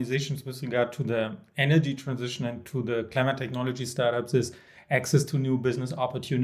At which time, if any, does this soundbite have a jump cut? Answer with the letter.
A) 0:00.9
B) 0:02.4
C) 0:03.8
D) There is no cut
D